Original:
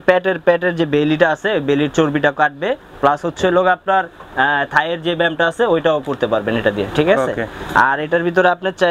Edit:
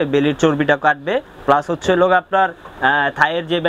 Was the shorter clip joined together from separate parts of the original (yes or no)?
no